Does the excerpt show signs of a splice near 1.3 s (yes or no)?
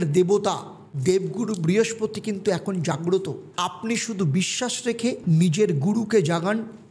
no